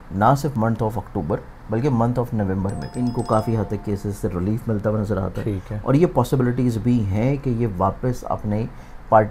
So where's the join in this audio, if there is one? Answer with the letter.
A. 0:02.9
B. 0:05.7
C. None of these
A